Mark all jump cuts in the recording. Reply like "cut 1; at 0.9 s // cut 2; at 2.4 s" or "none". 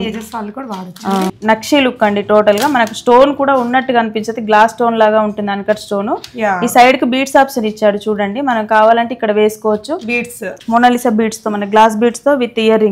cut 1; at 1.3 s // cut 2; at 10.5 s